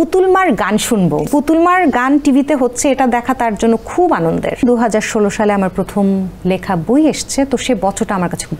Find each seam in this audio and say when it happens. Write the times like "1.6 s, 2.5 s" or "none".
1.3 s, 4.6 s